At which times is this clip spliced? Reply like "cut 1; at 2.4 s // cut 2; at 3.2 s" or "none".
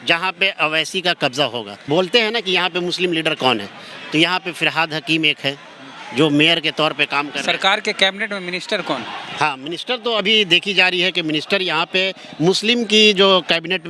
cut 1; at 1.7 s